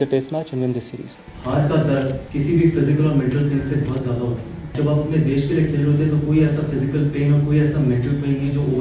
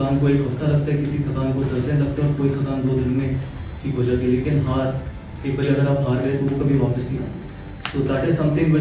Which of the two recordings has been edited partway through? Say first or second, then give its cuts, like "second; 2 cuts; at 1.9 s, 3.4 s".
first; 3 cuts; at 1.1 s, 2.2 s, 4.7 s